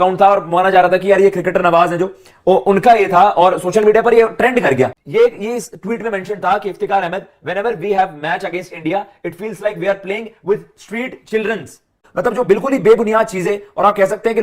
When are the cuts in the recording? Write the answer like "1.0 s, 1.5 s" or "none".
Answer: 5.0 s, 12.0 s

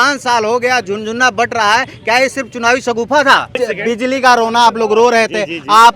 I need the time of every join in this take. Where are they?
3.6 s

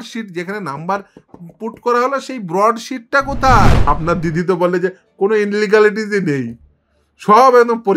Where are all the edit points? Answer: 3.9 s

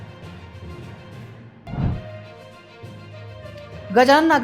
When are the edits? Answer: 1.0 s

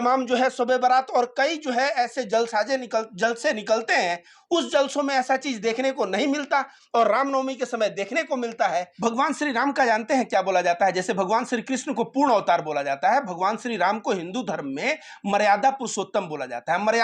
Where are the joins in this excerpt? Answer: 8.9 s

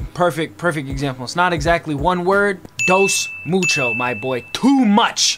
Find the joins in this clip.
2.7 s

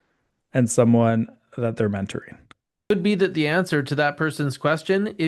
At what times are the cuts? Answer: 2.9 s

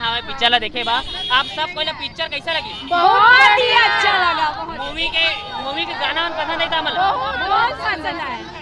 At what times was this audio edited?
none

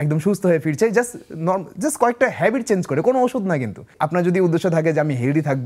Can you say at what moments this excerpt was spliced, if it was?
3.9 s

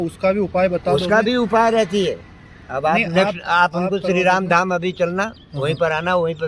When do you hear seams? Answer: none

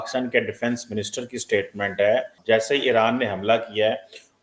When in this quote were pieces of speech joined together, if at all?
none

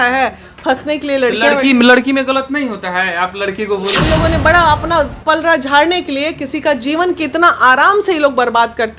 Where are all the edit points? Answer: 4.0 s

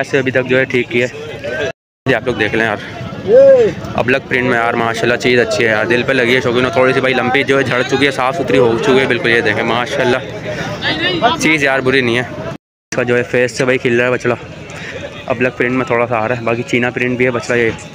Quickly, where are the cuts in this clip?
2.0 s, 12.7 s

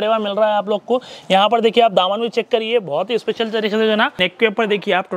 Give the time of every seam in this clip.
4.2 s

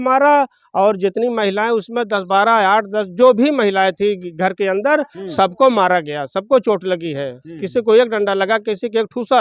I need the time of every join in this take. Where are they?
none

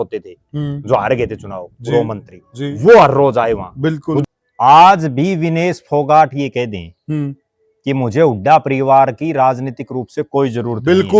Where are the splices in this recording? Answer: 4.2 s

